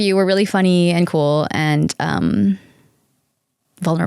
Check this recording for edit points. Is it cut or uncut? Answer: uncut